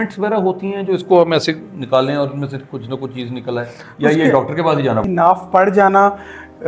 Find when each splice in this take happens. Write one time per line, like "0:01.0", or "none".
0:05.0